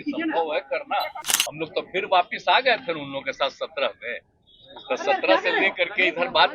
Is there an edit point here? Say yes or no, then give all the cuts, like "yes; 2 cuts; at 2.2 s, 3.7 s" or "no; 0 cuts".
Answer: yes; 1 cut; at 1.2 s